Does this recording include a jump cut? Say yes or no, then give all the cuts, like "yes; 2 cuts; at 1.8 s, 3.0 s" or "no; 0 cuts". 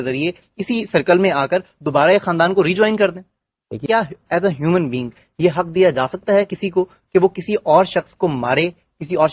yes; 1 cut; at 3.8 s